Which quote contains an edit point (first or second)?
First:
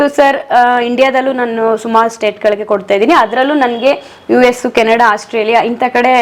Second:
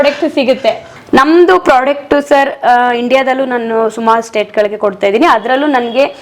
second